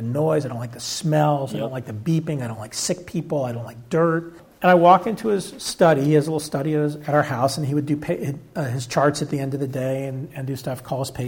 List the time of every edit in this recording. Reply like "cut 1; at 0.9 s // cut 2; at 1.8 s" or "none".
cut 1; at 4.4 s